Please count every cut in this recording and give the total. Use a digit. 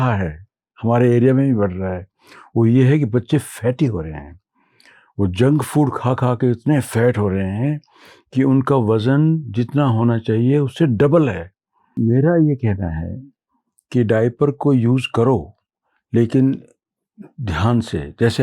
1